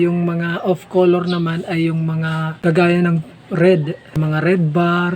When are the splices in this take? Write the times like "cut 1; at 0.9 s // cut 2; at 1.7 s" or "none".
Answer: cut 1; at 2.5 s // cut 2; at 4.2 s